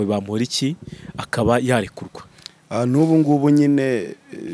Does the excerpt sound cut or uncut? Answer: uncut